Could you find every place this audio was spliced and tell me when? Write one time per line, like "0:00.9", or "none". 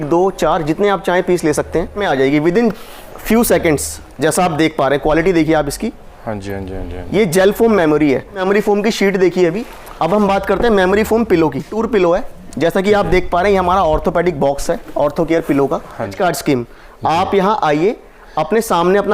0:02.0
0:08.4
0:11.8
0:16.1

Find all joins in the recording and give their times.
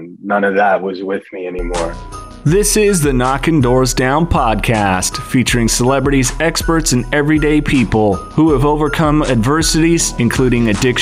0:02.3

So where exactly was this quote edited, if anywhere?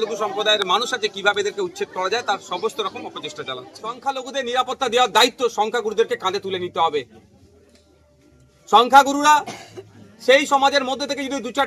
0:03.9

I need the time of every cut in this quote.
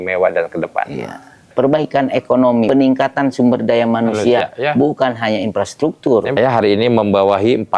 0:01.5
0:02.7
0:06.4

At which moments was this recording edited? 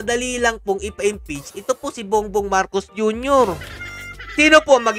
none

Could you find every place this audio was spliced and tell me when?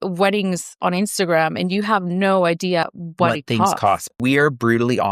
0:02.8
0:04.1

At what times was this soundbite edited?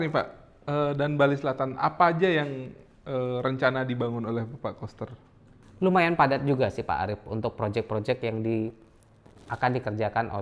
none

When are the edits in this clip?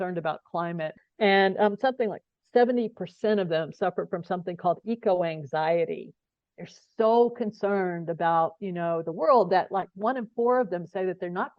0:00.9

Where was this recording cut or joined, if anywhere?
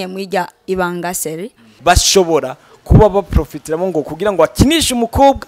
0:01.7

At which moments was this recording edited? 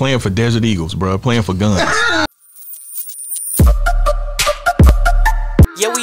0:02.3

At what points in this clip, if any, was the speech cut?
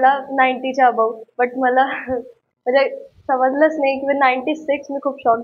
none

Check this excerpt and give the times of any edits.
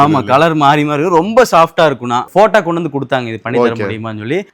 0:02.2

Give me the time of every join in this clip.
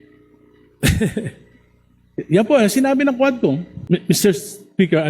0:03.7

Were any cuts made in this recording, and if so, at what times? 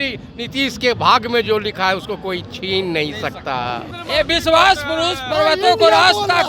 0:03.9

